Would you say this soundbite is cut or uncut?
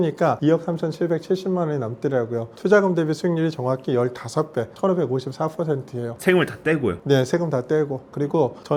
uncut